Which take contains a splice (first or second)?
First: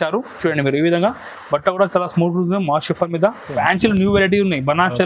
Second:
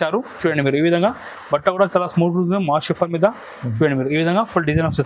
first